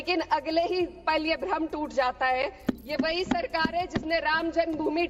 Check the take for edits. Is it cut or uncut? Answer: cut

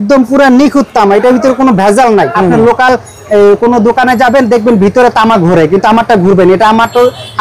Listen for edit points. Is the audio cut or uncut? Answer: cut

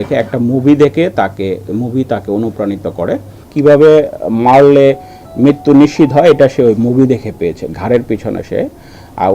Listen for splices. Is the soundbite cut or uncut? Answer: cut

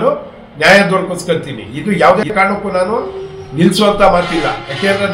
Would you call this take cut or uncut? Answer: uncut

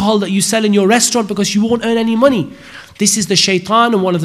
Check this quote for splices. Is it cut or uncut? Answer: uncut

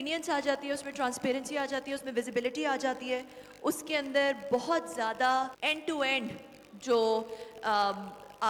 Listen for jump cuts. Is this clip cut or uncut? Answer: cut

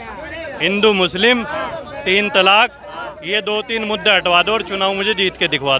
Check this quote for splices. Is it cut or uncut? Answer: uncut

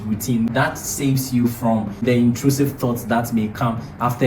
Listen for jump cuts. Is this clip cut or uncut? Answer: uncut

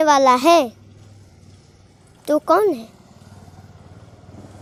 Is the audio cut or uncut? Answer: uncut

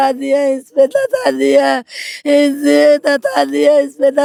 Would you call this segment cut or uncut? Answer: uncut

